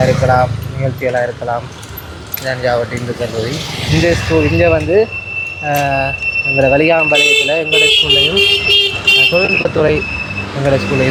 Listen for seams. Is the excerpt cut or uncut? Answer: uncut